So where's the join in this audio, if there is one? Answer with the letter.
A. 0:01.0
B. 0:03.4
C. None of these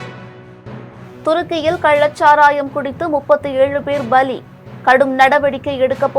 A